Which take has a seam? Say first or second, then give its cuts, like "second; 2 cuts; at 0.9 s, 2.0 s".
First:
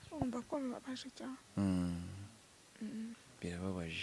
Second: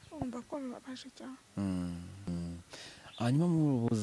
second; 1 cut; at 2.3 s